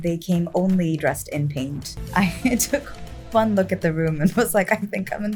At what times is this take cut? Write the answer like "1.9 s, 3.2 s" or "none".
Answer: none